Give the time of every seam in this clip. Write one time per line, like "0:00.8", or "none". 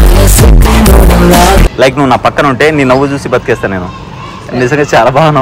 0:01.6